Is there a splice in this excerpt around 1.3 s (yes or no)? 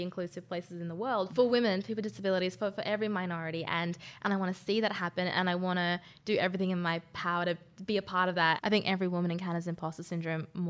yes